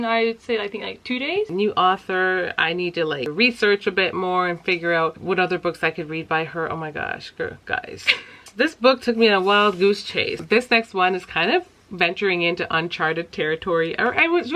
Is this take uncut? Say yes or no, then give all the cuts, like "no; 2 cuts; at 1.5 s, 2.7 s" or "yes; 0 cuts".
no; 5 cuts; at 1.5 s, 3.3 s, 5.2 s, 8.4 s, 10.4 s